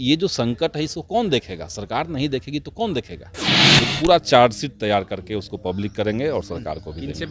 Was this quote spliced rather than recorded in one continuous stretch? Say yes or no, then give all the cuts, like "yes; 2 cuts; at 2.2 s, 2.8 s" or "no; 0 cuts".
yes; 1 cut; at 3.5 s